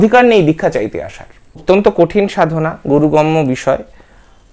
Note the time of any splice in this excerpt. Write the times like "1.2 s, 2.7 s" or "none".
1.6 s